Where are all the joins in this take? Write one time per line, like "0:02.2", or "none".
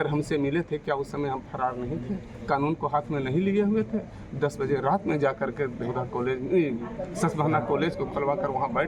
none